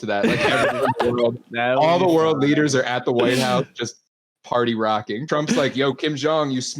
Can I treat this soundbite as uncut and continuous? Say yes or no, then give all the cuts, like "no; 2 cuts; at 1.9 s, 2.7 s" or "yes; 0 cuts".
no; 1 cut; at 5.2 s